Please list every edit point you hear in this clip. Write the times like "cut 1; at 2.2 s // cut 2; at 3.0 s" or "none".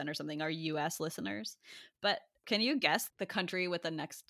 cut 1; at 2.4 s